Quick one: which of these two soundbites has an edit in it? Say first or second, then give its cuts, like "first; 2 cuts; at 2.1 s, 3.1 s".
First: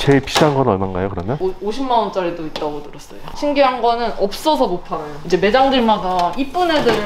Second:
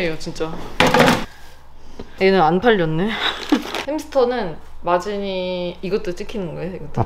first; 3 cuts; at 1.4 s, 3.2 s, 5.2 s